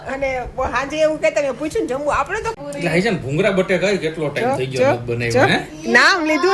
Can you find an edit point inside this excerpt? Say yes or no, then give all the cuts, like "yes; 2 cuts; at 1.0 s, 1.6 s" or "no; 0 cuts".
yes; 1 cut; at 2.5 s